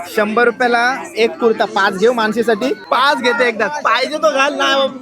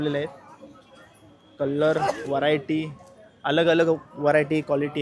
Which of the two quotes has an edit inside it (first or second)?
first